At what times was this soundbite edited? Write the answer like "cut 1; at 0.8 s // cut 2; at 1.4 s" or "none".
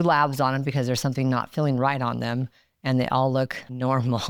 none